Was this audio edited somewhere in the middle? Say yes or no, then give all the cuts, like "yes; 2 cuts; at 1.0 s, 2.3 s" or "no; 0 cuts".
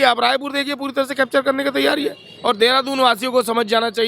yes; 1 cut; at 2.3 s